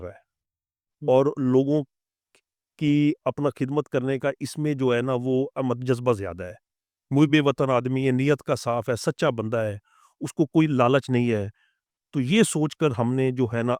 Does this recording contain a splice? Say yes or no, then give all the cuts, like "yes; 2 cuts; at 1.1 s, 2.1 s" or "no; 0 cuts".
no; 0 cuts